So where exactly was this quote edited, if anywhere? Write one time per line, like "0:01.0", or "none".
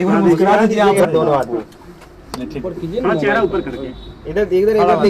0:01.0